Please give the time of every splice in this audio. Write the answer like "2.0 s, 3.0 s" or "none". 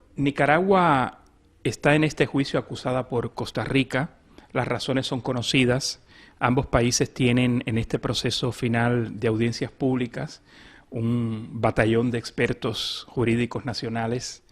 1.7 s